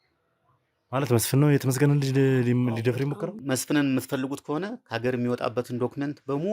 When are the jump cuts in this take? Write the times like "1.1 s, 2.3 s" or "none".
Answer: 3.3 s